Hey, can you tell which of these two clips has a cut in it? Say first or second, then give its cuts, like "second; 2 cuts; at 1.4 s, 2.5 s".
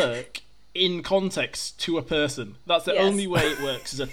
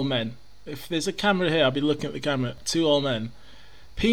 second; 1 cut; at 2.6 s